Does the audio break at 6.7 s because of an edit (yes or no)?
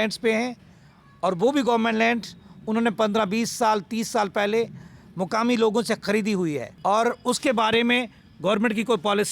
yes